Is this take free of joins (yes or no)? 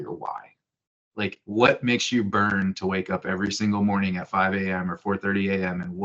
yes